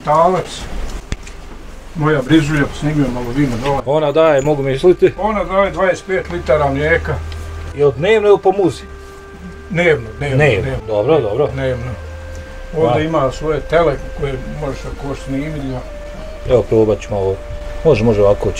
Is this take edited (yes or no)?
no